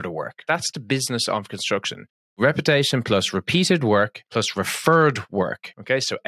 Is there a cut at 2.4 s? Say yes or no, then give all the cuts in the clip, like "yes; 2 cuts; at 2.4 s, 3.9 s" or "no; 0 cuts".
yes; 1 cut; at 2.4 s